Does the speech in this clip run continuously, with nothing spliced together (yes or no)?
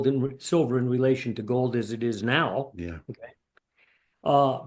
yes